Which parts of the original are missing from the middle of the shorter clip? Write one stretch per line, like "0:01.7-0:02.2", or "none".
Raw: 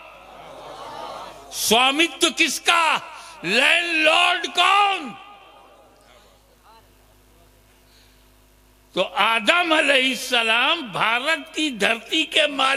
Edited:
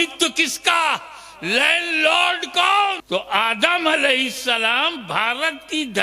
0:05.0-0:08.9